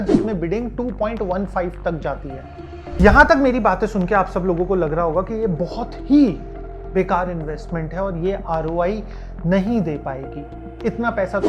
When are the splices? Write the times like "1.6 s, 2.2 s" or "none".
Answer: 3.0 s